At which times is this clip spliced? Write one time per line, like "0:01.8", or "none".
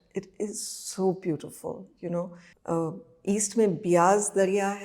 0:02.5